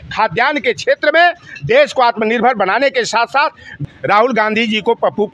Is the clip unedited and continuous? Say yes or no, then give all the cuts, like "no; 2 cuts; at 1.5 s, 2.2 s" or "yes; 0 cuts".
no; 1 cut; at 3.8 s